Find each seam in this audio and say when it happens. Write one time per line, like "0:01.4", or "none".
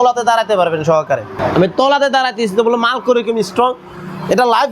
0:01.3